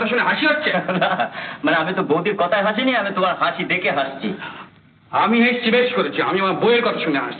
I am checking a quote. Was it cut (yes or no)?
no